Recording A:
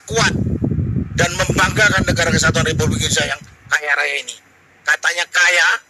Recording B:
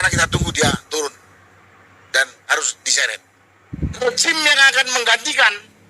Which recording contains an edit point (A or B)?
B